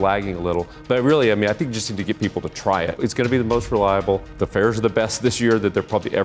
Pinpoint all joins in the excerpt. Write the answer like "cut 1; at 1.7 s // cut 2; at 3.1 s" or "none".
cut 1; at 3.0 s // cut 2; at 4.3 s